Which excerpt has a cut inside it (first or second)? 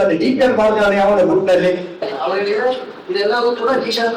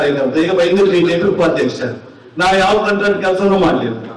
first